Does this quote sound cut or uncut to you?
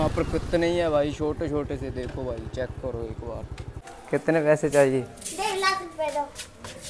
cut